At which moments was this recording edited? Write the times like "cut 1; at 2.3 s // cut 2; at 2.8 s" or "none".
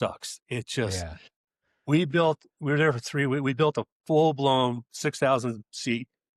none